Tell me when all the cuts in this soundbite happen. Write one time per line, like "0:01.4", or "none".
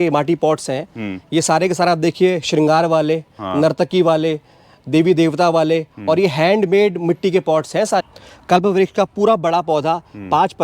0:08.0